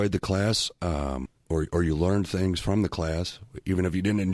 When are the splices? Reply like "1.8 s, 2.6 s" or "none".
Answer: 1.3 s